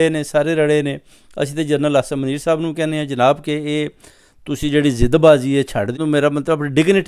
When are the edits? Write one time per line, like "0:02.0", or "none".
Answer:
0:06.0